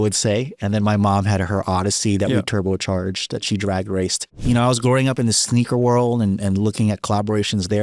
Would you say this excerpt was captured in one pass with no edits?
no; 1 cut; at 4.4 s

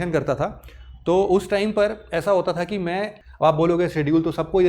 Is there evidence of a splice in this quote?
yes; 1 cut; at 3.2 s

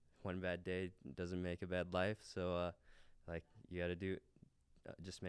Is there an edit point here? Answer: no; 0 cuts

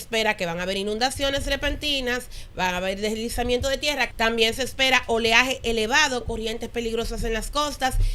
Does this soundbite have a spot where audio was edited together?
yes; 1 cut; at 4.1 s

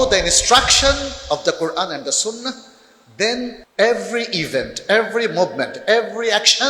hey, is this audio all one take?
no; 1 cut; at 3.6 s

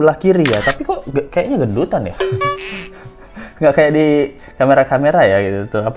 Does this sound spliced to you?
no; 0 cuts

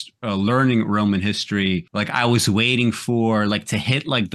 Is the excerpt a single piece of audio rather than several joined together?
no; 1 cut; at 1.9 s

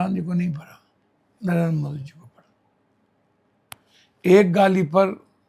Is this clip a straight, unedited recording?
yes; 0 cuts

